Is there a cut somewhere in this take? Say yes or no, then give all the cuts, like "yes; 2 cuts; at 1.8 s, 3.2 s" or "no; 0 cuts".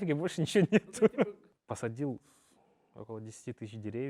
yes; 1 cut; at 1.5 s